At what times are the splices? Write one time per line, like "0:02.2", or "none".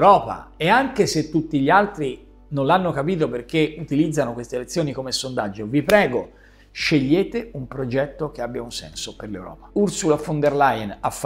0:09.6

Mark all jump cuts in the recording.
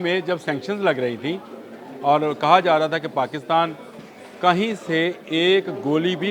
none

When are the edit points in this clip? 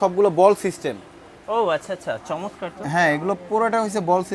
none

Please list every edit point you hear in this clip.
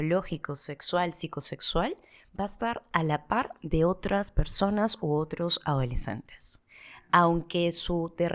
none

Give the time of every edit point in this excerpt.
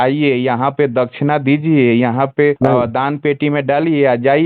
0:02.6

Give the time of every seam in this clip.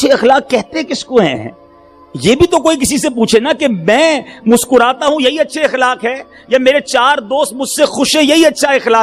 none

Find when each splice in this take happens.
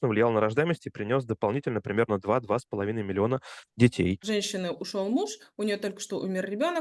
0:04.2

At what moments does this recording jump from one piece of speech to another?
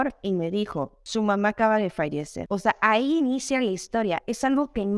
0:01.0
0:02.3

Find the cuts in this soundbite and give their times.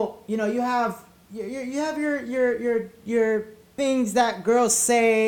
0:03.6

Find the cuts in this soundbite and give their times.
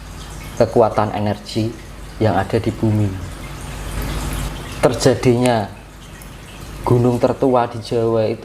0:04.1

